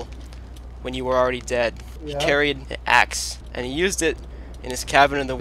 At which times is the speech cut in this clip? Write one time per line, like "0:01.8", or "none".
0:01.9
0:02.7
0:03.4